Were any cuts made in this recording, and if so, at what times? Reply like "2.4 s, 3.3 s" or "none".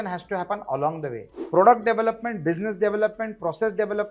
1.3 s